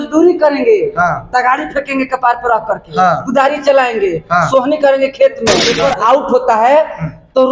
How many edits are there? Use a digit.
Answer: 1